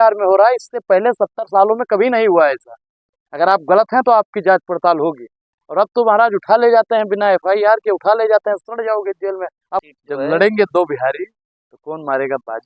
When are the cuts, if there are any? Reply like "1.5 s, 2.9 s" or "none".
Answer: 9.8 s